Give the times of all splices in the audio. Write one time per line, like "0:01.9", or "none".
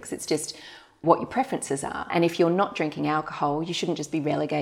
0:01.0
0:02.1